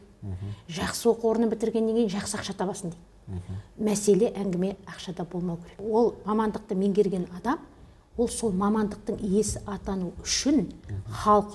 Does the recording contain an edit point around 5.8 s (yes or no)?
no